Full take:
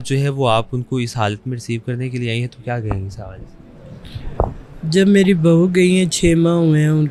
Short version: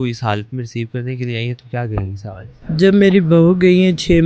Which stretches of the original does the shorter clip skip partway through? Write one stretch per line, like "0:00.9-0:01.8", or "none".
0:03.4-0:04.6